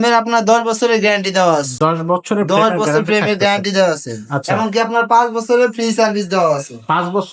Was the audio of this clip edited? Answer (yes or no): no